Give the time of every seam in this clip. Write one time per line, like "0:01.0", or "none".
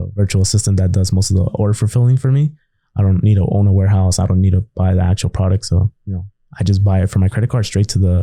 none